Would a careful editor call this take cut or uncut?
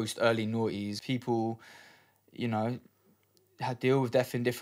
cut